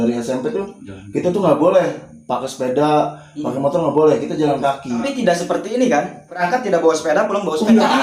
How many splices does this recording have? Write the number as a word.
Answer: two